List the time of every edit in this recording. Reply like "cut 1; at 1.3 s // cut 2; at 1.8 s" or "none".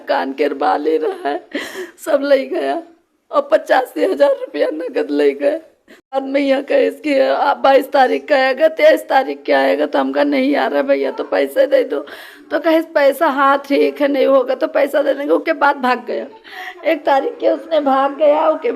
cut 1; at 6.2 s